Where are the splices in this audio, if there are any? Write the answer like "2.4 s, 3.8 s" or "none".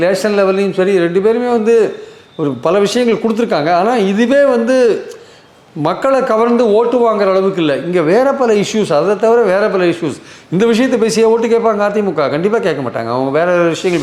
none